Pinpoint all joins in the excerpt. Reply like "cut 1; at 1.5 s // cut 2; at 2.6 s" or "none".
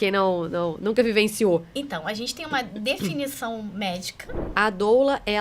cut 1; at 4.5 s